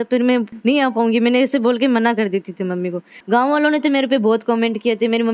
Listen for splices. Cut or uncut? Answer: cut